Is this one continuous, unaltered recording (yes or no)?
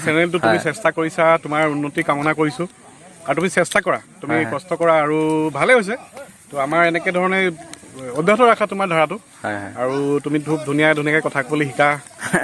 yes